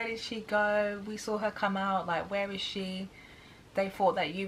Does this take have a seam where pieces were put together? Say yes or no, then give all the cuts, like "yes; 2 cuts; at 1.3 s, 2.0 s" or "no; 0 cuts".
no; 0 cuts